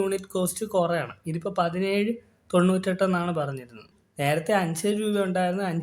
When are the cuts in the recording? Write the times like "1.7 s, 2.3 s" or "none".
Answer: 3.9 s